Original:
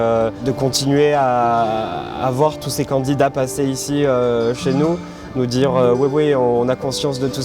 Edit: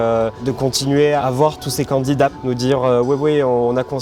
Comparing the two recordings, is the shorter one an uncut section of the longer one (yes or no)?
no